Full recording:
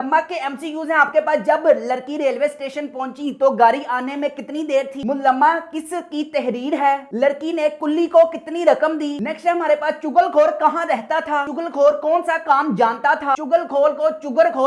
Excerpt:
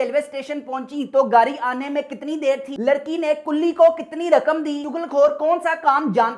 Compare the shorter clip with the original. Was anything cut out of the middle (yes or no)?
yes